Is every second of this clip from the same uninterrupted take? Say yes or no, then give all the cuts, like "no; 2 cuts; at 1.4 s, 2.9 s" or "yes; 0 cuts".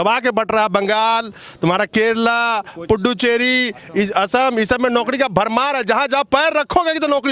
yes; 0 cuts